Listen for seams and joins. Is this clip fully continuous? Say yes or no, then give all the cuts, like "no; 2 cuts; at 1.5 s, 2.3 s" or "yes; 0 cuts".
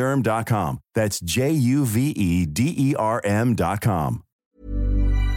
no; 1 cut; at 4.3 s